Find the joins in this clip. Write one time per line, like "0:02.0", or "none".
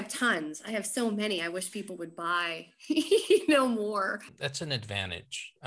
0:04.0